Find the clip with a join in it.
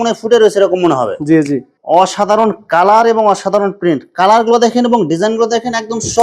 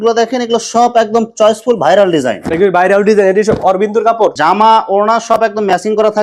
first; 1 cut; at 1.7 s

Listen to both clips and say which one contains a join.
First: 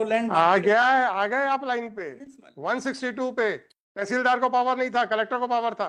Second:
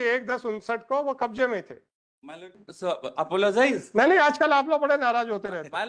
second; 1 cut; at 2.6 s

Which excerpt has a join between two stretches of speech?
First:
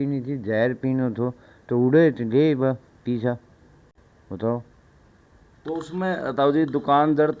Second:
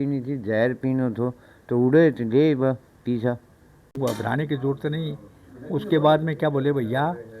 second; 1 cut; at 4.0 s

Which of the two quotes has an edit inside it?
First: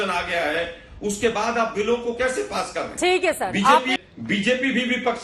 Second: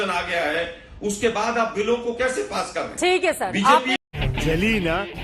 first; 1 cut; at 4.1 s

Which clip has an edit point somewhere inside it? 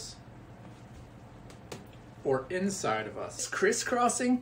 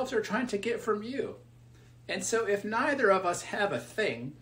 first; 1 cut; at 3.5 s

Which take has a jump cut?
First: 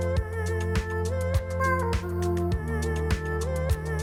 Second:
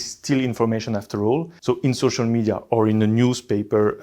second; 1 cut; at 1.5 s

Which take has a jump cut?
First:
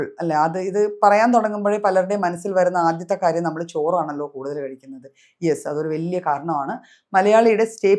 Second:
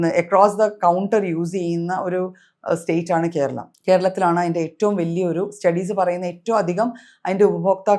second; 1 cut; at 3.7 s

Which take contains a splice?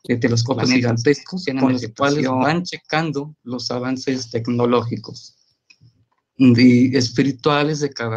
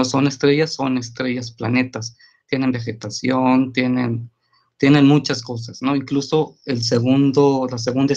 first; 1 cut; at 4.7 s

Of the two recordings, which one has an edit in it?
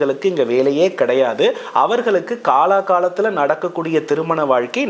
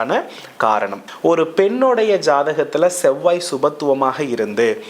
second; 1 cut; at 1.0 s

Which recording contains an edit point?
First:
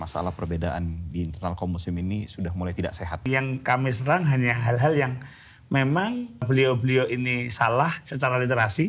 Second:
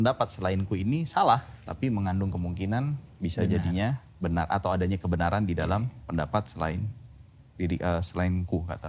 first; 2 cuts; at 3.3 s, 6.5 s

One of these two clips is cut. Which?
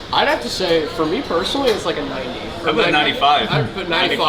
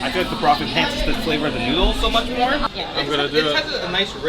second; 1 cut; at 2.8 s

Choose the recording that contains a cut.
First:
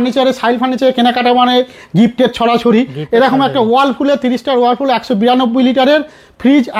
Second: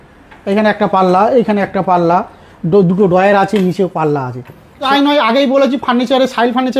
second; 1 cut; at 4.8 s

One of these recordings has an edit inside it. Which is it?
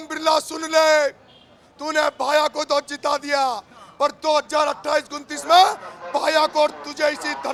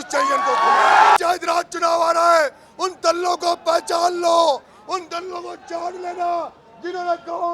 second; 1 cut; at 1.2 s

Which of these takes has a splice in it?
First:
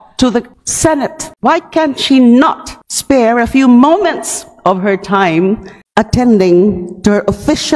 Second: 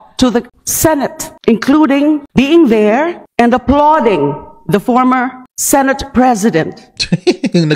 first; 1 cut; at 1.3 s

